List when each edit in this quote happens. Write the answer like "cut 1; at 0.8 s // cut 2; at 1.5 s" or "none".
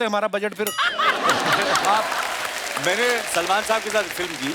cut 1; at 2.2 s